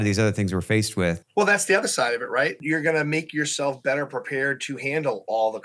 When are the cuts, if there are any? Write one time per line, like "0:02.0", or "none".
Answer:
0:01.2
0:02.6